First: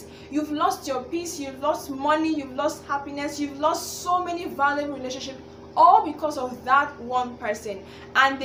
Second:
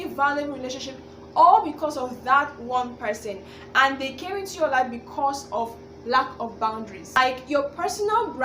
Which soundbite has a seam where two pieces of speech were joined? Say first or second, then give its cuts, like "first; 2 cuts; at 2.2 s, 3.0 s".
second; 1 cut; at 7.2 s